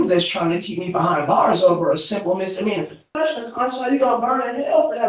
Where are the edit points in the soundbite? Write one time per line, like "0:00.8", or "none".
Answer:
0:03.1